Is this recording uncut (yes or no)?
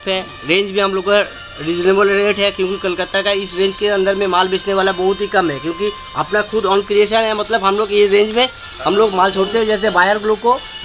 yes